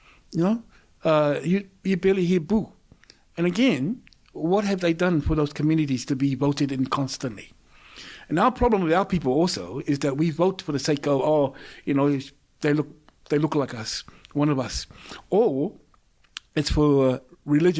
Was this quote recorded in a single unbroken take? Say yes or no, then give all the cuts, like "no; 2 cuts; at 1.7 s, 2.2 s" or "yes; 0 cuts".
yes; 0 cuts